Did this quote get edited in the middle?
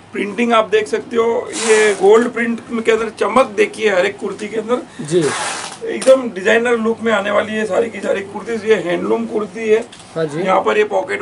no; 0 cuts

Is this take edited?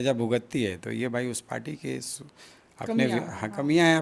no; 0 cuts

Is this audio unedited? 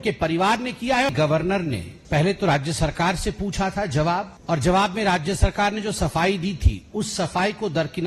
no; 3 cuts; at 1.1 s, 1.9 s, 4.3 s

